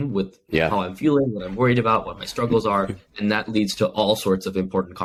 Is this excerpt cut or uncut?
uncut